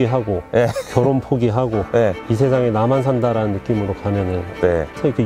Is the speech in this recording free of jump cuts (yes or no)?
yes